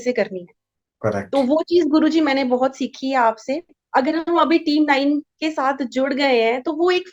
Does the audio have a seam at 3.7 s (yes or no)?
yes